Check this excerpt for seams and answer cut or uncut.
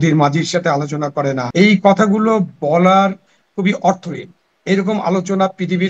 cut